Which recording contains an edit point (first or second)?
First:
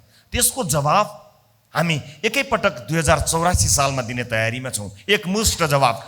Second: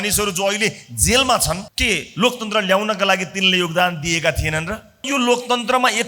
second